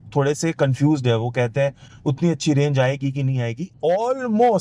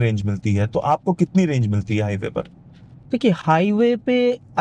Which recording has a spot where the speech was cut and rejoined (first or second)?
first